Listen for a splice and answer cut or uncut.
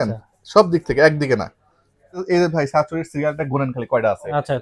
cut